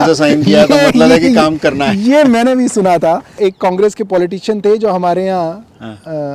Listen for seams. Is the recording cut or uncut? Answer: cut